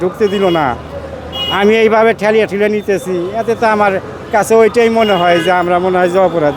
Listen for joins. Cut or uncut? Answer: uncut